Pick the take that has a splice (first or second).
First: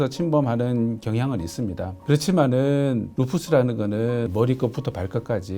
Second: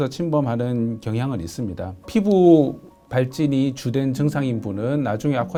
first